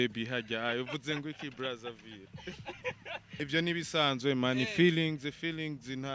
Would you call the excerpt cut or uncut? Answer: cut